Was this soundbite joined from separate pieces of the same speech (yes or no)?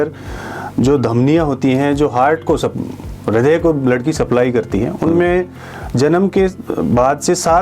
no